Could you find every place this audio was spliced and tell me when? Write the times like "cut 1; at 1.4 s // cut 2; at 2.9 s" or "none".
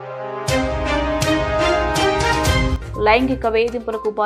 cut 1; at 2.7 s